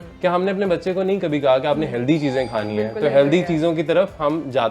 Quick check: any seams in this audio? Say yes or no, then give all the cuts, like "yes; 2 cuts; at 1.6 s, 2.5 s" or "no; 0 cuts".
no; 0 cuts